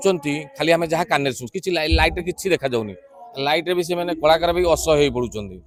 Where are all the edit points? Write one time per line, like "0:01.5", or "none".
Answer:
none